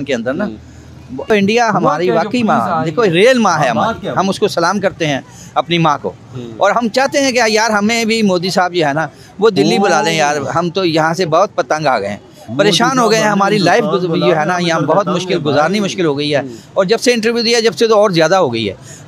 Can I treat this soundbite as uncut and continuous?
no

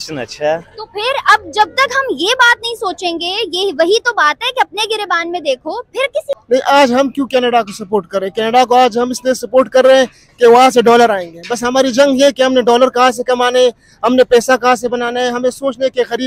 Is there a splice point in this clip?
yes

